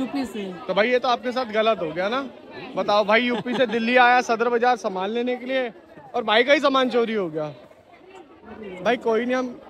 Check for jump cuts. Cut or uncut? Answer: uncut